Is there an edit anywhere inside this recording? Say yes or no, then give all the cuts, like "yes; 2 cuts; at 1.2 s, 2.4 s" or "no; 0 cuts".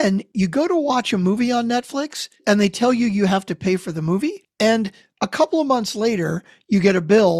yes; 2 cuts; at 2.3 s, 4.4 s